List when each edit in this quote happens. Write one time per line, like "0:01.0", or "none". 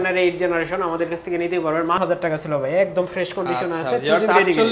0:02.0